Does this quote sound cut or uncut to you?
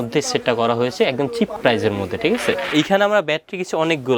cut